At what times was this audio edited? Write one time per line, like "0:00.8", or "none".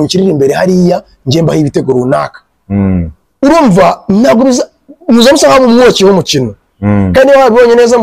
none